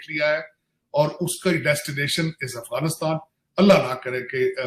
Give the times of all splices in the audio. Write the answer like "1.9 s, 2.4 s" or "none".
none